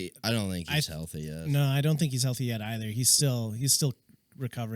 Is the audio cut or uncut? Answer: uncut